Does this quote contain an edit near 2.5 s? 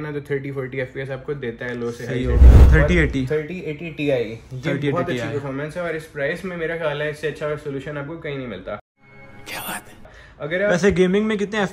yes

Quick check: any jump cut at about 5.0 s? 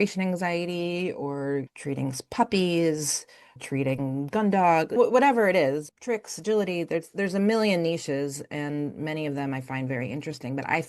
yes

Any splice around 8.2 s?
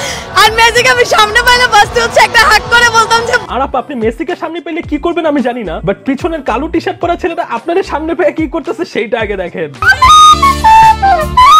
no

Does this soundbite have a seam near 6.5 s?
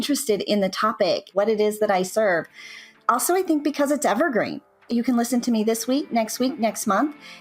no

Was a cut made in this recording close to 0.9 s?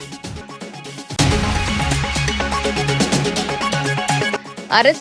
no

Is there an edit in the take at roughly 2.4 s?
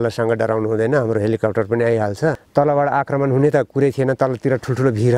yes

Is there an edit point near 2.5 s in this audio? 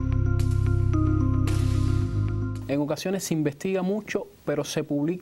yes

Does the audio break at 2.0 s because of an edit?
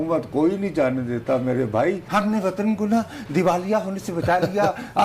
yes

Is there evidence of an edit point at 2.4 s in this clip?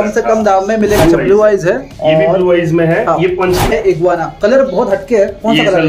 no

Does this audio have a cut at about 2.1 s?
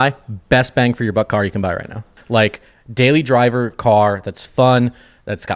yes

